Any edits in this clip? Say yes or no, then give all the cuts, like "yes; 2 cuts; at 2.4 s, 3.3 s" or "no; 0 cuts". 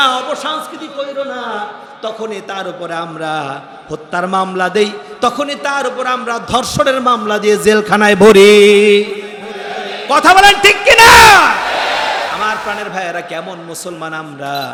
no; 0 cuts